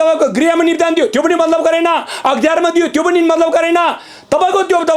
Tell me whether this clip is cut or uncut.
uncut